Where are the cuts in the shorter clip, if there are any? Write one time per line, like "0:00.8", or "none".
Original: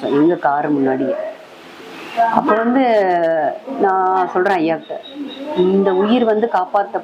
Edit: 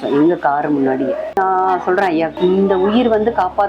0:01.4
0:02.3